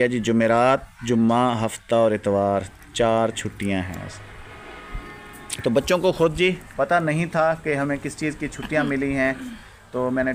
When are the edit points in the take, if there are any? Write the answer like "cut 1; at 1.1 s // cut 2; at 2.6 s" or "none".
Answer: none